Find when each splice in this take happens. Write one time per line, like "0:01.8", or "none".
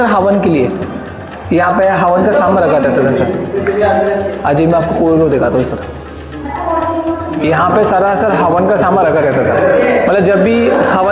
none